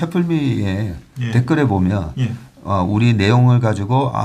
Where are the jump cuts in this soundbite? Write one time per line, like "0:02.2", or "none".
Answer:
none